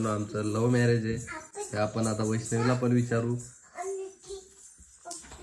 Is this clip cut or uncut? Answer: uncut